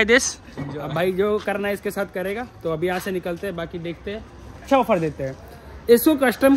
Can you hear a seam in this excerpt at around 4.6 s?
yes; 1 cut; at 4.6 s

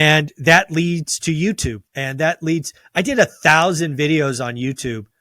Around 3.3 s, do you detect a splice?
no; 1 cut; at 1.9 s

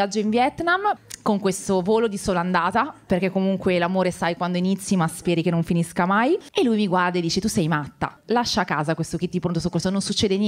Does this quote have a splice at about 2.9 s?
no; 1 cut; at 6.5 s

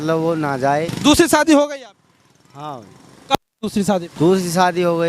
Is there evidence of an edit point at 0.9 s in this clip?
yes; 2 cuts; at 0.9 s, 4.1 s

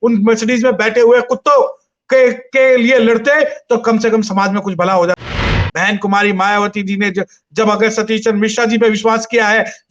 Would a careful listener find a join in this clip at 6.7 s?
no; 1 cut; at 5.4 s

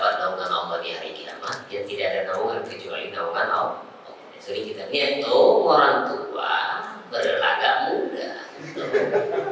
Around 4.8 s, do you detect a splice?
yes; 1 cut; at 4.8 s

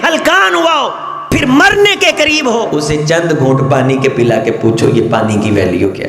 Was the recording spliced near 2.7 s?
yes; 2 cuts; at 1.1 s, 2.7 s

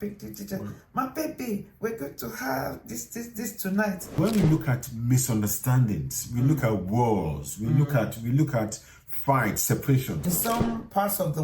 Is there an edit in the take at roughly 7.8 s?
no; 2 cuts; at 4.1 s, 10.2 s

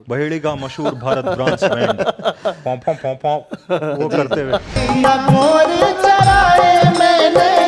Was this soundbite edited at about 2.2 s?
no; 1 cut; at 4.8 s

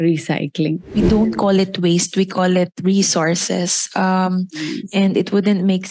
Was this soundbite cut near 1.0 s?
yes; 1 cut; at 1.0 s

